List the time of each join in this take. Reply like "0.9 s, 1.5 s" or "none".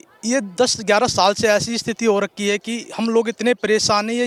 none